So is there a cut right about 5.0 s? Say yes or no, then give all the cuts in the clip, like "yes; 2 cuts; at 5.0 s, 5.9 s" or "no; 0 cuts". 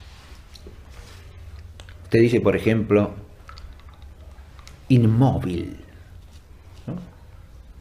no; 0 cuts